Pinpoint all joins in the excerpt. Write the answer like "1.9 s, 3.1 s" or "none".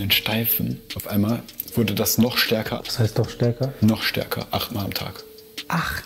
0.8 s, 2.8 s, 4.7 s